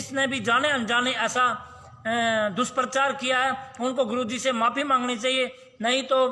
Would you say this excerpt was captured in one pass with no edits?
yes; 0 cuts

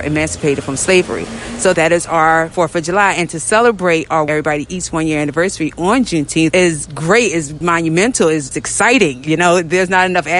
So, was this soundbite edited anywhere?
yes; 6 cuts; at 1.8 s, 2.5 s, 4.3 s, 6.5 s, 7.5 s, 8.5 s

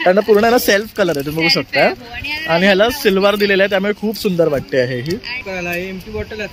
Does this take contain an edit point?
yes; 1 cut; at 5.4 s

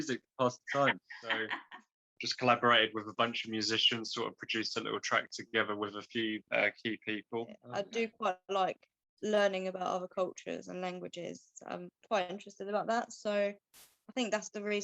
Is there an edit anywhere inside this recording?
yes; 2 cuts; at 1.5 s, 7.5 s

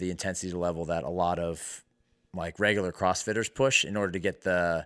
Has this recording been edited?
no; 0 cuts

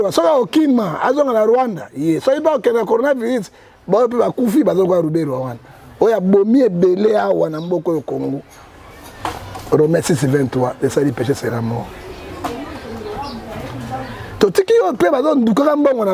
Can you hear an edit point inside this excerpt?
no; 0 cuts

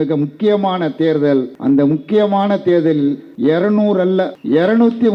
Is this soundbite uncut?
no; 3 cuts; at 1.5 s, 3.3 s, 4.3 s

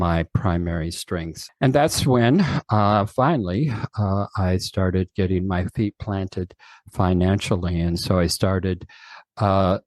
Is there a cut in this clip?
yes; 1 cut; at 1.4 s

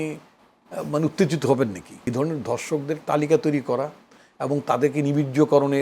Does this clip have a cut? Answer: yes; 1 cut; at 1.9 s

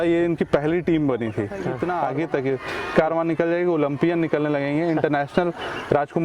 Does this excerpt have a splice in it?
yes; 1 cut; at 1.6 s

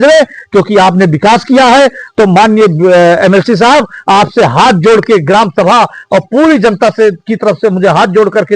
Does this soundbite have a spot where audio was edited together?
yes; 1 cut; at 2.0 s

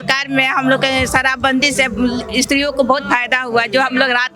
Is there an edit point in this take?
no; 0 cuts

